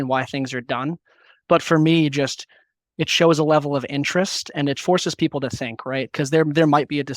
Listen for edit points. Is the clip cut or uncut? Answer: cut